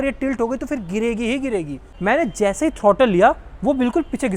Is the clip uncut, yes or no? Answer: no